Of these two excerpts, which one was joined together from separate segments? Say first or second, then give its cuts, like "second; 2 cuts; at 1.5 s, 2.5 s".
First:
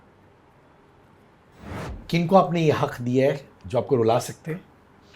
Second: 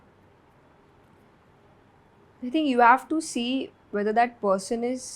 first; 1 cut; at 1.7 s